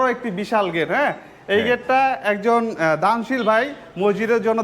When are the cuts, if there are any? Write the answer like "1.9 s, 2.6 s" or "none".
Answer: none